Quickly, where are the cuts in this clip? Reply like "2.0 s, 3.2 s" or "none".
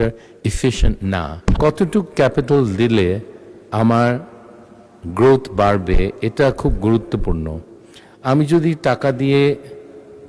1.3 s